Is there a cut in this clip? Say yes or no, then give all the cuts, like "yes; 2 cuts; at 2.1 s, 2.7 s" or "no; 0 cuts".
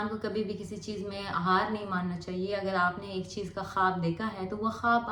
no; 0 cuts